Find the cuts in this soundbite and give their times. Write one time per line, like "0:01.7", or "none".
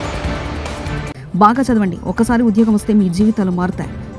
0:01.1

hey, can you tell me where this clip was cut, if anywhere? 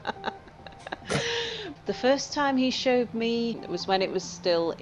0:01.7
0:03.5

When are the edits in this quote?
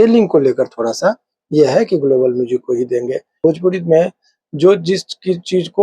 0:03.4

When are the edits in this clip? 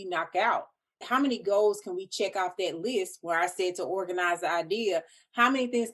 0:01.0

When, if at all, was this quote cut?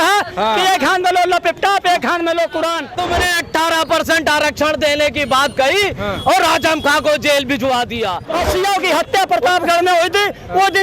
0:02.9
0:08.3

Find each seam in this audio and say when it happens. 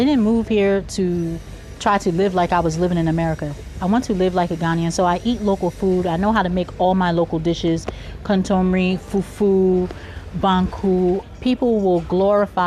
0:11.2

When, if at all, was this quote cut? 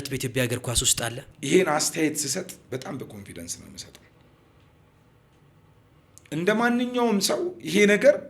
0:01.3

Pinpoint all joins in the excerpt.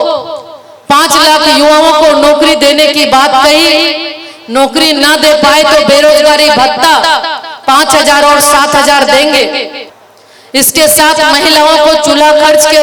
none

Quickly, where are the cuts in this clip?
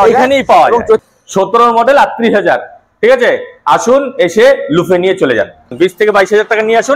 0:01.0
0:05.7

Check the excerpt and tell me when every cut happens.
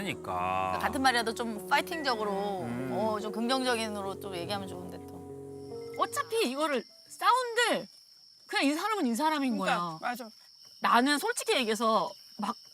0:05.9

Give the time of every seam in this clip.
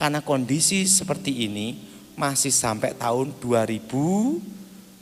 none

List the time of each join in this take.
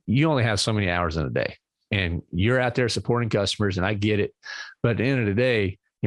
0:01.8

